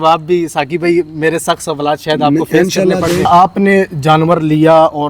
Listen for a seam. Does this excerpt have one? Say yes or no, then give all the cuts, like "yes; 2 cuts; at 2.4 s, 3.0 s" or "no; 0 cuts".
yes; 1 cut; at 3.3 s